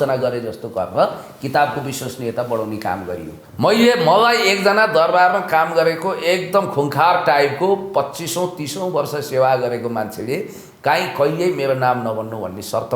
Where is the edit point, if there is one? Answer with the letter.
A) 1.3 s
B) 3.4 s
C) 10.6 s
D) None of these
B